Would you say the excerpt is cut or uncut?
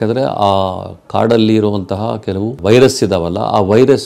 cut